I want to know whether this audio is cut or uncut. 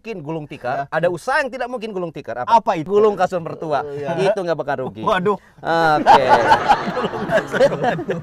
cut